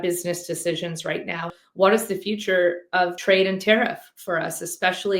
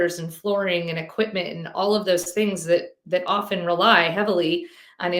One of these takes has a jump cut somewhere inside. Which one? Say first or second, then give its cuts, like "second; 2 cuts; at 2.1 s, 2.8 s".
first; 2 cuts; at 1.5 s, 3.2 s